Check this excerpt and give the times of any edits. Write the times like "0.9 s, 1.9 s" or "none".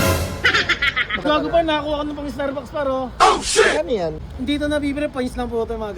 1.2 s, 4.3 s